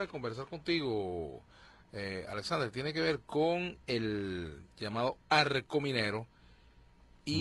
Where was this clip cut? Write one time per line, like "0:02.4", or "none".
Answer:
0:05.3